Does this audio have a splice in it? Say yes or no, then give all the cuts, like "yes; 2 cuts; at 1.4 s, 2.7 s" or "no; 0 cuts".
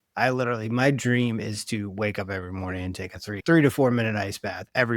yes; 1 cut; at 3.4 s